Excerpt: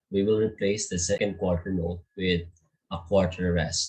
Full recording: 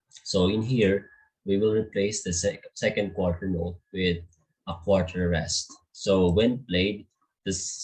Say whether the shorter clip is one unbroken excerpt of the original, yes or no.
no